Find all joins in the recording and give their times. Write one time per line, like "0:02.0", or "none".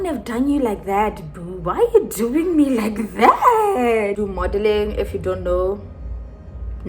0:04.2